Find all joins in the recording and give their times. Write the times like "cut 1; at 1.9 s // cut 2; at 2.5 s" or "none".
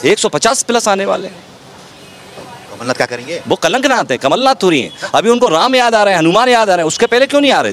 none